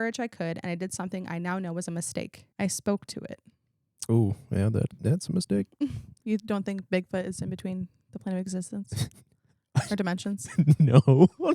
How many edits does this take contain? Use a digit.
1